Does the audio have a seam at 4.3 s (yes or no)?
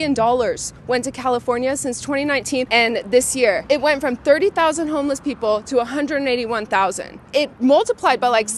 no